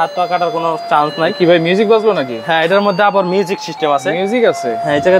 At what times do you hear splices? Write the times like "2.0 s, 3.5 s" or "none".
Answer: none